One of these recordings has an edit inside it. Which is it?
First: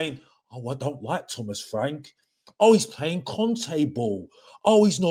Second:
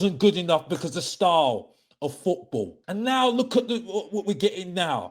second; 1 cut; at 2.8 s

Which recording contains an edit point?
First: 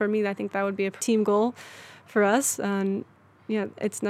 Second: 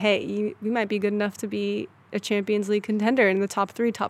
first; 1 cut; at 1.0 s

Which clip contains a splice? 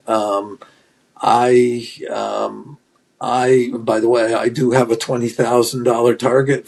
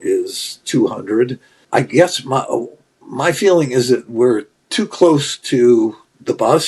second; 1 cut; at 1.5 s

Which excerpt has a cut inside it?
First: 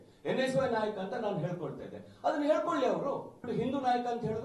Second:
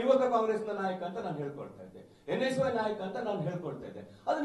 first; 1 cut; at 3.4 s

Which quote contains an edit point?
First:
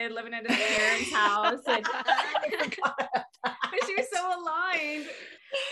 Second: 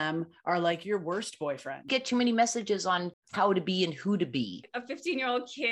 second; 3 cuts; at 1.9 s, 3.2 s, 4.7 s

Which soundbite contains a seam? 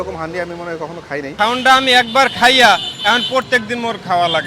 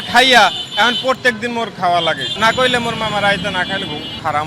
first; 1 cut; at 1.3 s

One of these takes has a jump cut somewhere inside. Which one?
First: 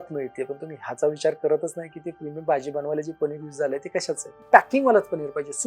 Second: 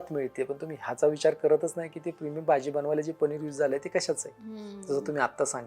first; 1 cut; at 4.4 s

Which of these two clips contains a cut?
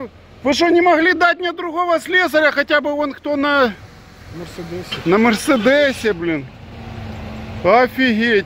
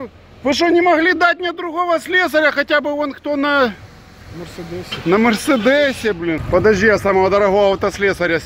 second; 1 cut; at 6.4 s

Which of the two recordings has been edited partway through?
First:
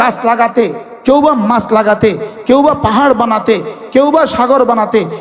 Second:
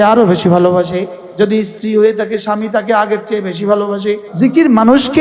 second; 2 cuts; at 1.2 s, 4.3 s

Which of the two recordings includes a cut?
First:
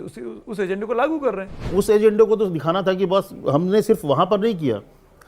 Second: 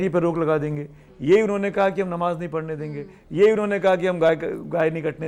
first; 1 cut; at 1.7 s

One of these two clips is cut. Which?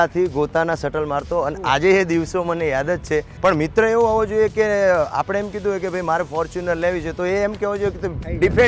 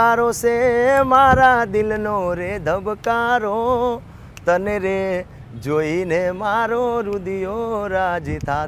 first; 1 cut; at 3.3 s

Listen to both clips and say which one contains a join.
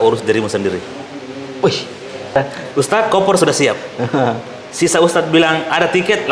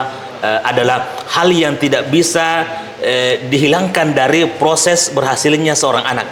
first; 1 cut; at 2.4 s

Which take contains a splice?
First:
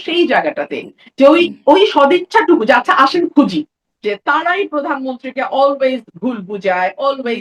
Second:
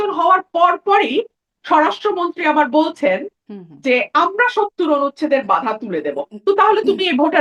first; 1 cut; at 3.9 s

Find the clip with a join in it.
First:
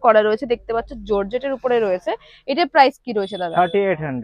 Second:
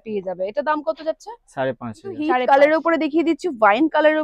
second; 1 cut; at 2.3 s

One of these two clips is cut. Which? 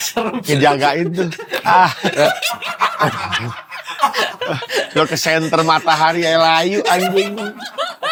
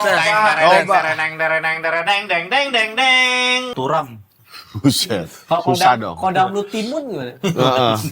second; 1 cut; at 3.7 s

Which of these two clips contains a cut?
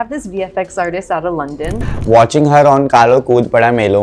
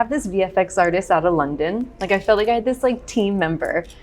first; 1 cut; at 1.9 s

